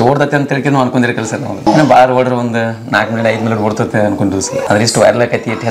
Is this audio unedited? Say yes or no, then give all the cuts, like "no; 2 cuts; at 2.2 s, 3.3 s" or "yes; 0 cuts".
no; 2 cuts; at 1.7 s, 4.6 s